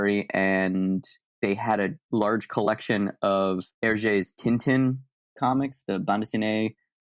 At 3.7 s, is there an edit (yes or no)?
yes